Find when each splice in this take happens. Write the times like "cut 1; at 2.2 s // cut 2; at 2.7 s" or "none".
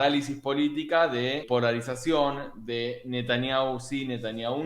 cut 1; at 1.4 s